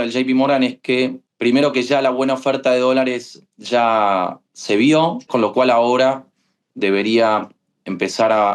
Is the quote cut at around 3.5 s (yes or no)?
no